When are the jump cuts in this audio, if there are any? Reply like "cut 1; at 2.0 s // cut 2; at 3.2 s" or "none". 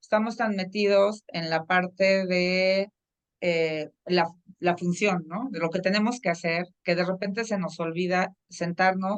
none